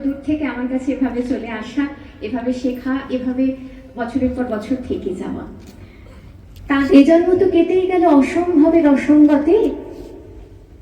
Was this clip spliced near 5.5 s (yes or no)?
no